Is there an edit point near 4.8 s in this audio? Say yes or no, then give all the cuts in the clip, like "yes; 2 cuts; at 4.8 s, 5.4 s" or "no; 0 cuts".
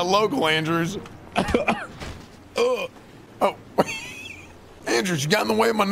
yes; 1 cut; at 4.8 s